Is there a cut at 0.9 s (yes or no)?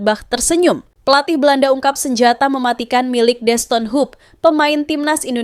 yes